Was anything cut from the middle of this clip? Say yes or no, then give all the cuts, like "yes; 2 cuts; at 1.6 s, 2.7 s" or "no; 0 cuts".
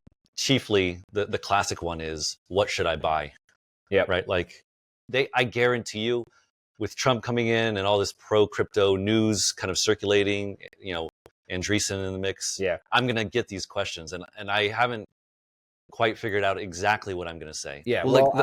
yes; 1 cut; at 5.0 s